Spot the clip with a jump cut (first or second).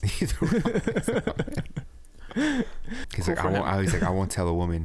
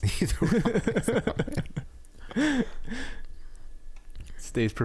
first